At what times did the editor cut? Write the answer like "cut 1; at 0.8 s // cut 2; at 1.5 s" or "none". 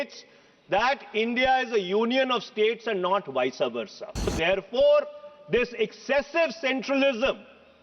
cut 1; at 4.3 s